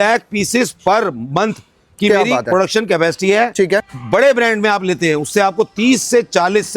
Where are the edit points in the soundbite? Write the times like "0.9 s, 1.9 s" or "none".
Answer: 3.9 s

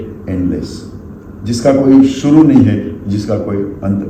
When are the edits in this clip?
none

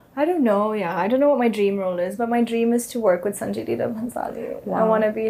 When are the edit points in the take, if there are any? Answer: none

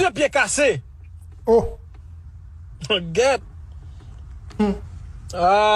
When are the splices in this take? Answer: none

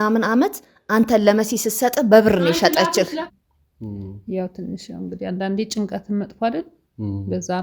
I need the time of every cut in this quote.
3.3 s

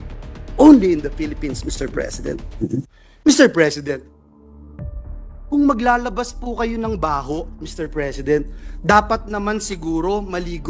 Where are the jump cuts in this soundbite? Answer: 3.0 s, 4.1 s, 5.4 s

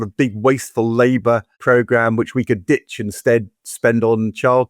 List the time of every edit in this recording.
1.5 s

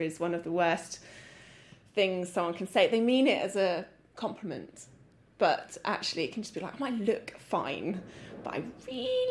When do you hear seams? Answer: none

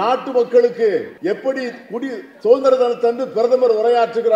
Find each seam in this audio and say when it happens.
1.1 s

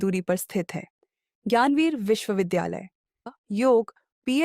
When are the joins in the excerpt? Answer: 3.3 s

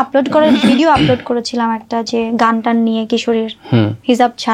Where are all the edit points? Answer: none

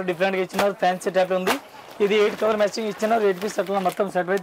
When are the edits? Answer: none

